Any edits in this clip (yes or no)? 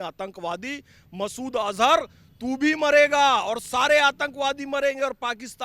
no